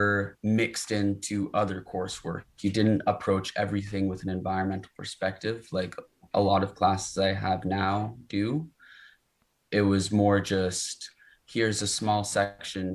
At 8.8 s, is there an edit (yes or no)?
no